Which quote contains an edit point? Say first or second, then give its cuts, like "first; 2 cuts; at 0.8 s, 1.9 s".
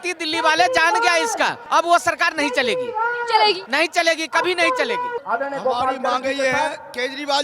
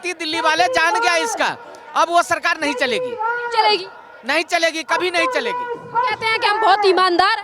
first; 3 cuts; at 1.6 s, 3.7 s, 5.2 s